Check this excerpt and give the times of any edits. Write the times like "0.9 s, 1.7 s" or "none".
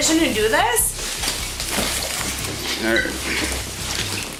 none

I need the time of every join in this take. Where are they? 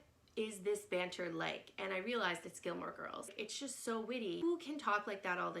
3.3 s, 4.4 s

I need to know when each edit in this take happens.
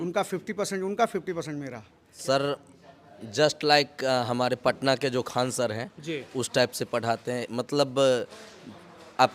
2.1 s

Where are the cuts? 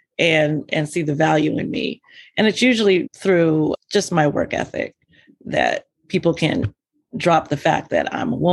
3.1 s

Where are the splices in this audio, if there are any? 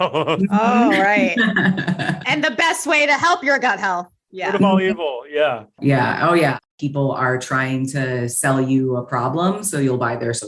5.7 s, 6.6 s

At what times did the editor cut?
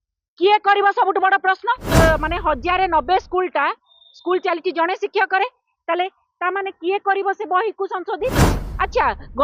1.8 s

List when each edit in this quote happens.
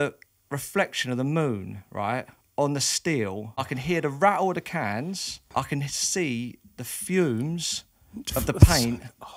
3.6 s, 5.3 s

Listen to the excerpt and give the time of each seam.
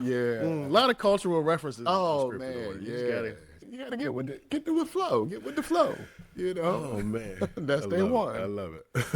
3.7 s

